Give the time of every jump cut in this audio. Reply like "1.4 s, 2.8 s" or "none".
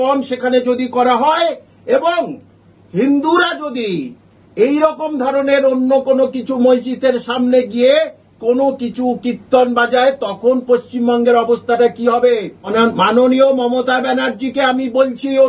12.7 s

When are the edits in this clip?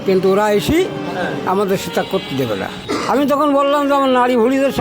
2.7 s

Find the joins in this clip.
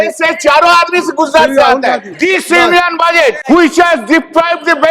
2.1 s, 3.4 s

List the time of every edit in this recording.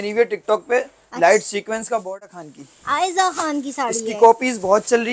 2.1 s

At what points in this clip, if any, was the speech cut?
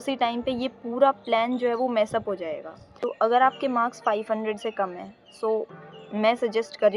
3.0 s

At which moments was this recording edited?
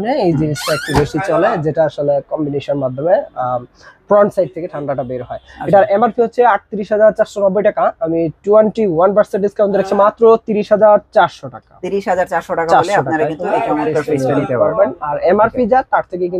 none

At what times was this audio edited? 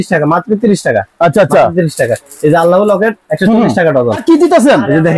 4.2 s

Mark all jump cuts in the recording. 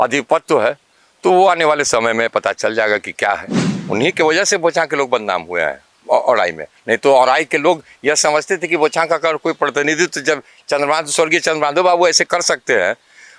3.5 s

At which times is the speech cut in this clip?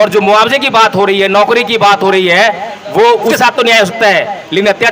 3.4 s

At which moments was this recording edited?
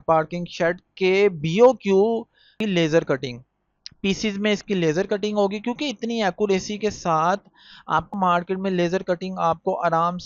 2.6 s, 8.1 s

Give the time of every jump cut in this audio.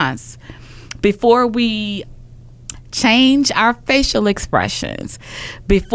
2.0 s

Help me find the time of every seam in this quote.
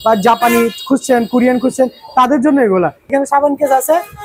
3.1 s

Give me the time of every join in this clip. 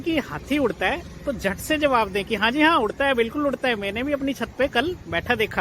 none

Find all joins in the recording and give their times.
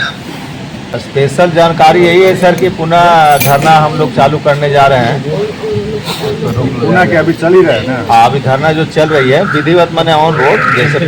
0.9 s

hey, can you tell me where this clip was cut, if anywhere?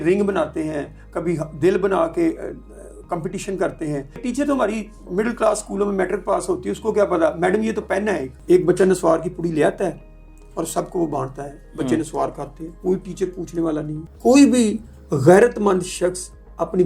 4.2 s, 8.3 s, 14.0 s

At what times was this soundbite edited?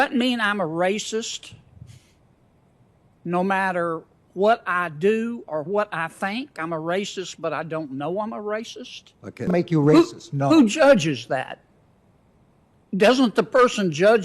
9.5 s

